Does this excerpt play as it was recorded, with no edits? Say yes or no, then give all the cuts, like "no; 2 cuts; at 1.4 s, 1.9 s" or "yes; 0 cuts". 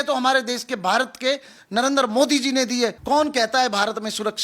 no; 1 cut; at 3.0 s